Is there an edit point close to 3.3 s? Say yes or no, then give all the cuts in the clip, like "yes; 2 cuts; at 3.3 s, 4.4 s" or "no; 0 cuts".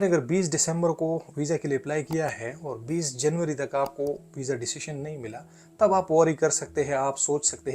no; 0 cuts